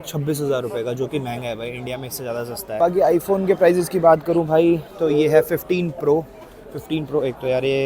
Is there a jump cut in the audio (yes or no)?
no